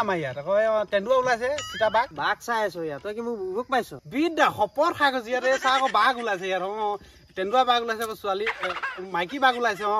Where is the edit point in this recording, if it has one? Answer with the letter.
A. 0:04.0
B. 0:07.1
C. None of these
A